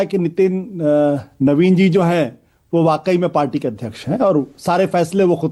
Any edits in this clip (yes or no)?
no